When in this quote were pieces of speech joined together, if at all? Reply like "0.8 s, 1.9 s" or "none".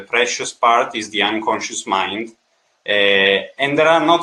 none